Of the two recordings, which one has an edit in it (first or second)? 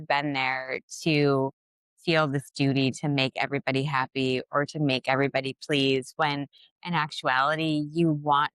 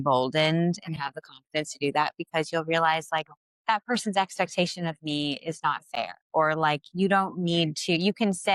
second